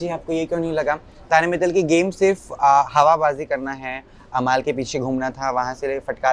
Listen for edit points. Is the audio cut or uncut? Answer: uncut